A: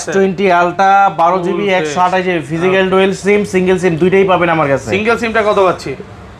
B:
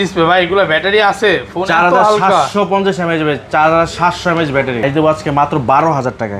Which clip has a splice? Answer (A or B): B